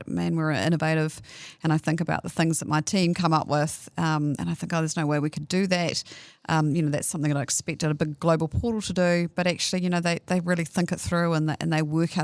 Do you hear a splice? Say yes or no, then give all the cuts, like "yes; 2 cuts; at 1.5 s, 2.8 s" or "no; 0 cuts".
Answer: no; 0 cuts